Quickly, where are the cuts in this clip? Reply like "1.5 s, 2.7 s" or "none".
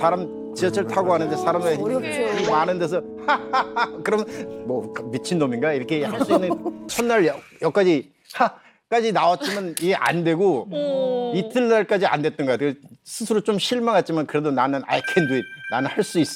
6.9 s